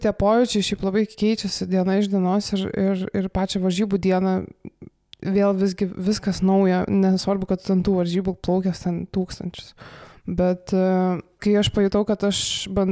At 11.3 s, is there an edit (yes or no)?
yes